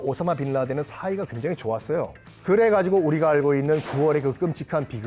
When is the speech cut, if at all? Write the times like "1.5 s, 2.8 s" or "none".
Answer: 2.2 s